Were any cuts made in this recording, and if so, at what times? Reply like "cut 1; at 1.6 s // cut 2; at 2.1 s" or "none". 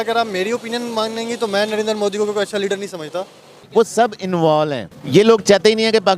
cut 1; at 3.8 s